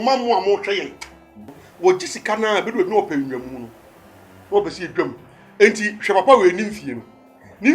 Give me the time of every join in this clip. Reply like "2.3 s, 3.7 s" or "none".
1.5 s